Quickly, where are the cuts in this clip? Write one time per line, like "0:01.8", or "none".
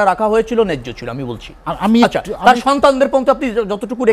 none